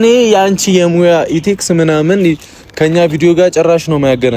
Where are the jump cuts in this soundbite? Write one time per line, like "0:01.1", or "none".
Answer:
none